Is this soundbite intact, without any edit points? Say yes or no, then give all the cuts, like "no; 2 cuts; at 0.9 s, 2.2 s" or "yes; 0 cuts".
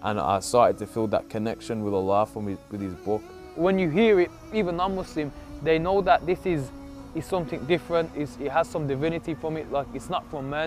no; 1 cut; at 3.4 s